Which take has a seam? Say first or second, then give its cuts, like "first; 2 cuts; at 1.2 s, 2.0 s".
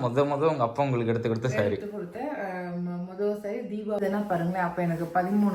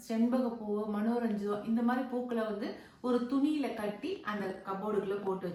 first; 1 cut; at 4.0 s